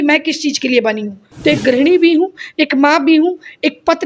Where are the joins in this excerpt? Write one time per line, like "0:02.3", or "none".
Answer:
0:01.2